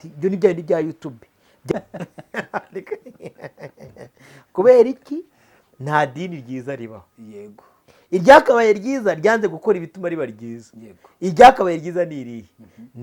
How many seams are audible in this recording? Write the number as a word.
one